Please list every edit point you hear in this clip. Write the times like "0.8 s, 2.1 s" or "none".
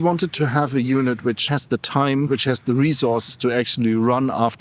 1.4 s, 2.3 s